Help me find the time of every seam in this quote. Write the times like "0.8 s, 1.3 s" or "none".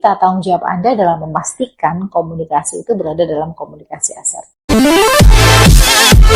4.7 s